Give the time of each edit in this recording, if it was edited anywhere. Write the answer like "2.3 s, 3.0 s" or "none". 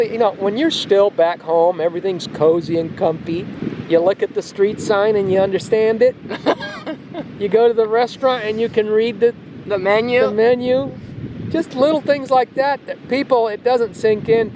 3.6 s